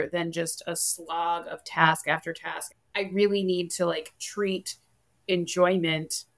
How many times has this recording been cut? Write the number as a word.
one